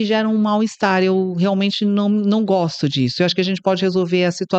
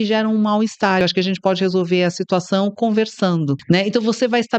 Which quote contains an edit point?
second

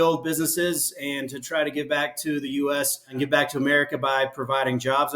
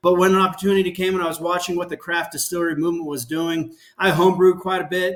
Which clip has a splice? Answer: first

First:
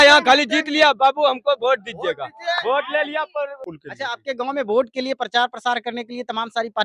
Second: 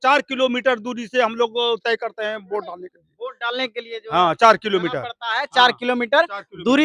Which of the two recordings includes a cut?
first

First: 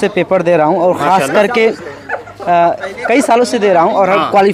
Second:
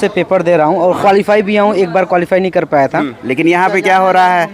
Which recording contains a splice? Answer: second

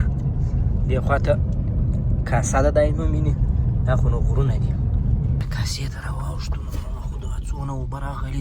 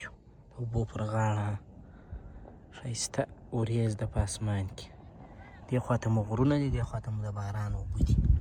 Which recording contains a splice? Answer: first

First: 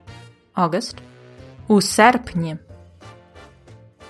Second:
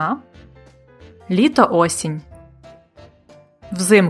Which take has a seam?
first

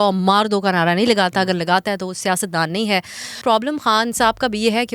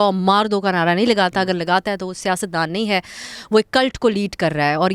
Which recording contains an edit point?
first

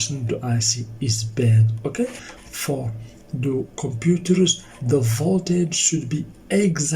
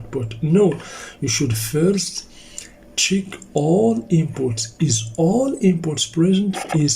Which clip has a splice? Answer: first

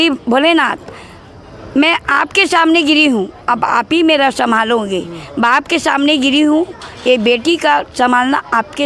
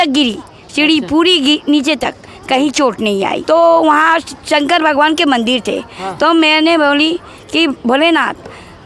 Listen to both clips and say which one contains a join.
second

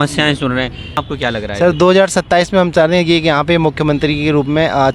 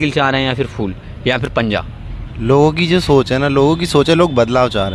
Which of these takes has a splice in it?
first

